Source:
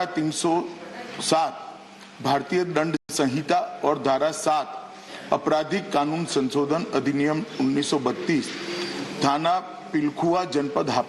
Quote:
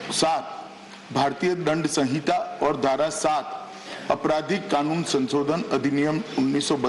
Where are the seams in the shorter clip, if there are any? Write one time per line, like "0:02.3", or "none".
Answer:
0:01.9